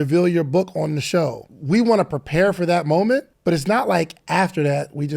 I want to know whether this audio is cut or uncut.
cut